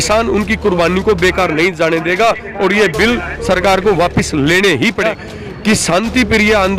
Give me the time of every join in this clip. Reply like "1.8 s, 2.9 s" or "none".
5.2 s